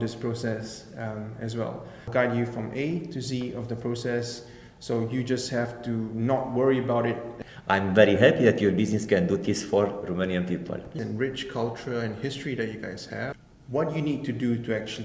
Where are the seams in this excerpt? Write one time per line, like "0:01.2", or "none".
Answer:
0:02.1
0:07.3
0:10.9
0:13.4